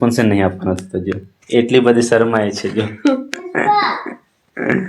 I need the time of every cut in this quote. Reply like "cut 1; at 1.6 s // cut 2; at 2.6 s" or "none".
none